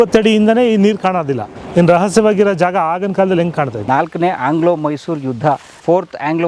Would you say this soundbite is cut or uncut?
cut